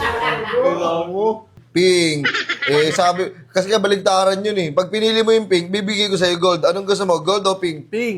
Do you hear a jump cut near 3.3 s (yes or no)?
no